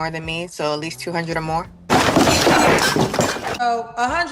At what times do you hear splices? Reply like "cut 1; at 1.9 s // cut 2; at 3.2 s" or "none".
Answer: cut 1; at 1.9 s // cut 2; at 3.7 s